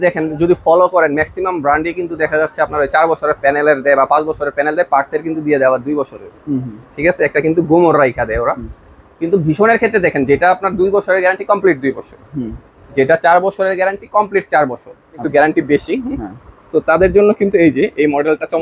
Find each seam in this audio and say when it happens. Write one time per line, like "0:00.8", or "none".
0:15.2